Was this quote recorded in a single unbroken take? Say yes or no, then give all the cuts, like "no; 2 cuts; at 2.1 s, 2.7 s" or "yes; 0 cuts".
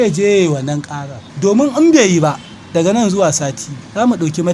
yes; 0 cuts